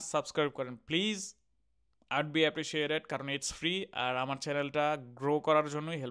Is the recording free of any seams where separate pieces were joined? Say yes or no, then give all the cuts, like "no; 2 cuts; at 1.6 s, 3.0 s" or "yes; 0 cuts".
yes; 0 cuts